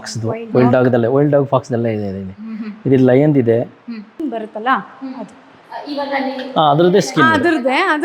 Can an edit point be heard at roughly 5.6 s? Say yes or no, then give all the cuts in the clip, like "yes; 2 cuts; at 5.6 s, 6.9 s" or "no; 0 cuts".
no; 1 cut; at 4.1 s